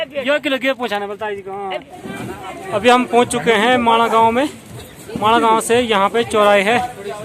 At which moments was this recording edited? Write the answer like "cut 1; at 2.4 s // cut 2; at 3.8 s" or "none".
cut 1; at 1.8 s